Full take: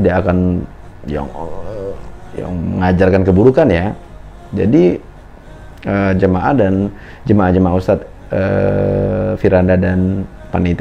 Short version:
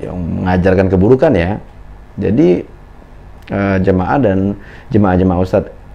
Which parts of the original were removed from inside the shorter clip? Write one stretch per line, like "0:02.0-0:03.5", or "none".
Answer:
none

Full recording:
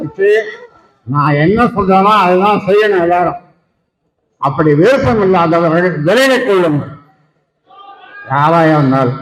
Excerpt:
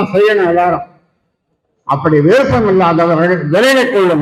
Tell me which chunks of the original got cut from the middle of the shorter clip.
none

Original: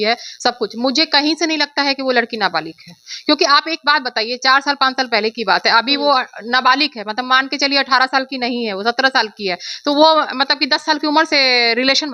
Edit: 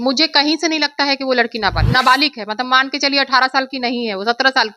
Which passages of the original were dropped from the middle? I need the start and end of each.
0:02.6-0:06.4

